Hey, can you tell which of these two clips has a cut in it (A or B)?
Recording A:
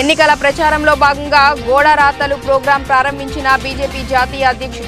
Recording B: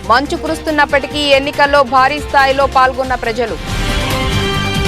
B